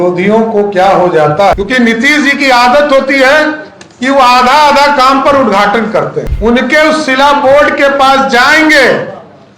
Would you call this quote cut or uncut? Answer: cut